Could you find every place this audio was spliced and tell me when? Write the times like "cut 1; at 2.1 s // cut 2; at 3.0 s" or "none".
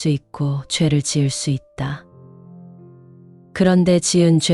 cut 1; at 2.0 s // cut 2; at 3.4 s